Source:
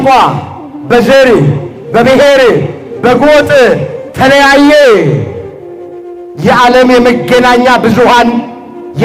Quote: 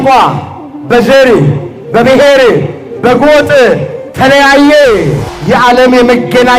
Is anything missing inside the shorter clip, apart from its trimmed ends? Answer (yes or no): yes